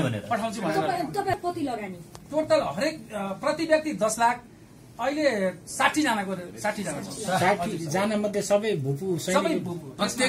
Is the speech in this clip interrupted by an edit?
yes; 1 cut; at 1.4 s

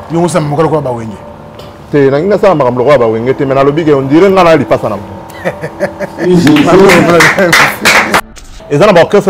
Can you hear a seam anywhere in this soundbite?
yes; 1 cut; at 8.2 s

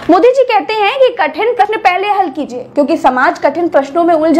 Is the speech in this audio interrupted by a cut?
yes; 1 cut; at 1.6 s

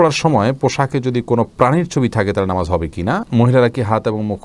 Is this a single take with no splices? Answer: no; 1 cut; at 3.3 s

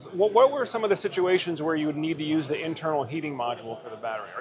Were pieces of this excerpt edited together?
no; 0 cuts

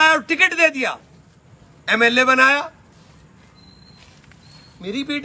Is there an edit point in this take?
no; 0 cuts

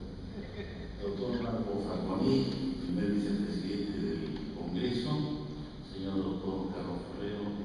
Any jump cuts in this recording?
yes; 1 cut; at 1.7 s

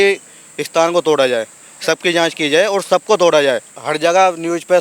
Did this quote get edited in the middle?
yes; 1 cut; at 3.8 s

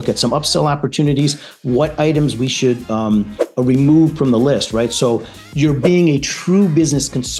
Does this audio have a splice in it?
no; 0 cuts

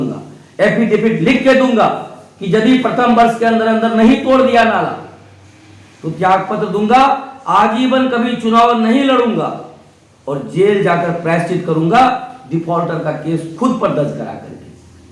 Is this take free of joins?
yes; 0 cuts

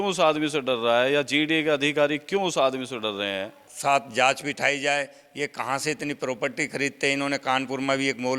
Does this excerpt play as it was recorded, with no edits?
no; 1 cut; at 3.6 s

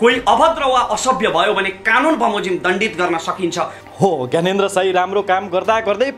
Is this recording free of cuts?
no; 1 cut; at 3.8 s

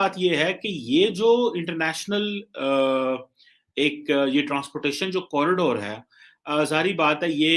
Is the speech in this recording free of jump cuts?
yes; 0 cuts

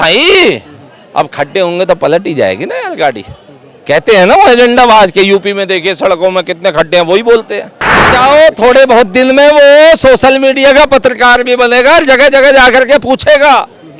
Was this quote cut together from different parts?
yes; 1 cut; at 8.1 s

